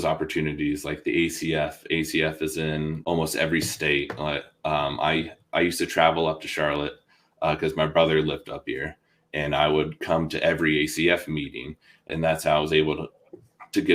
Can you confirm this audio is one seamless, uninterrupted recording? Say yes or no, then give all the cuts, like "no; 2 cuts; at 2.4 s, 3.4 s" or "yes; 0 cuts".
no; 2 cuts; at 3.0 s, 12.1 s